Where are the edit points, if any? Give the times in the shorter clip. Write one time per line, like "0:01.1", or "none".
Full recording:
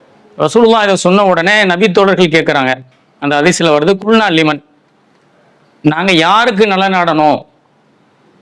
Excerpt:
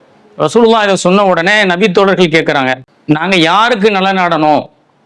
0:02.9

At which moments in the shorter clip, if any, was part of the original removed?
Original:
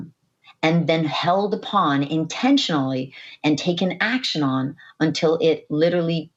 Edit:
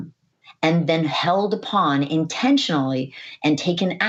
none

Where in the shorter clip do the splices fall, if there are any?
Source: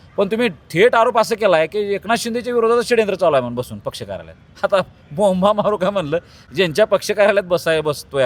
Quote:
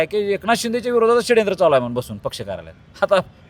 none

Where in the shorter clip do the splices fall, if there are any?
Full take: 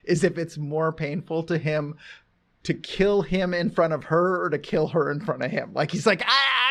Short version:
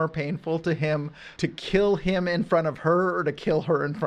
0:01.2

